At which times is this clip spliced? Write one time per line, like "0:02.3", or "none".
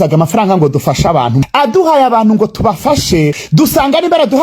0:01.4
0:03.4